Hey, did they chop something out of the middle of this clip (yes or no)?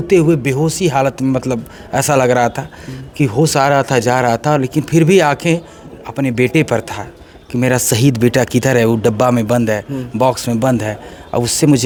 no